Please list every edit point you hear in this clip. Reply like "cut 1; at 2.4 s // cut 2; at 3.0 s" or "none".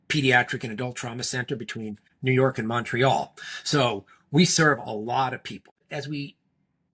cut 1; at 5.7 s